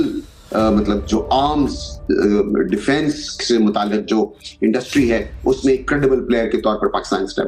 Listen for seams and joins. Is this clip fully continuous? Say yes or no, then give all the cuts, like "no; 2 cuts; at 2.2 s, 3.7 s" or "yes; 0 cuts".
yes; 0 cuts